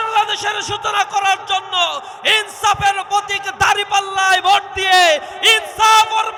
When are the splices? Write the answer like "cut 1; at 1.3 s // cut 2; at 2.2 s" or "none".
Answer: none